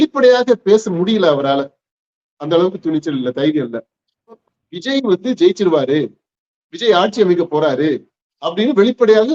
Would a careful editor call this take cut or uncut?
cut